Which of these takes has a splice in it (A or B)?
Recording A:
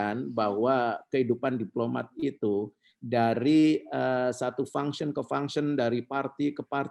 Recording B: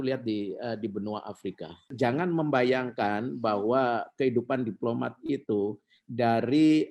B